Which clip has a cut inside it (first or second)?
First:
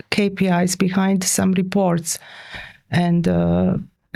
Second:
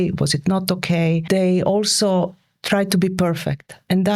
second